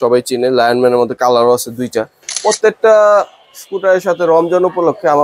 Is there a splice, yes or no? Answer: yes